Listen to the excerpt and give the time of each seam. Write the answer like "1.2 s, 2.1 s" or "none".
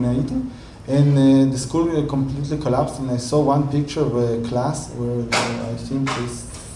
1.3 s